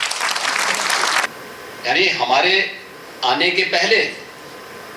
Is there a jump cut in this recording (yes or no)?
yes